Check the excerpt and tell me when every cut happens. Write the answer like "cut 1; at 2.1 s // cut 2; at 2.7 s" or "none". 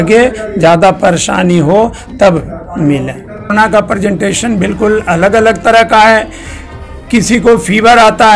cut 1; at 3.5 s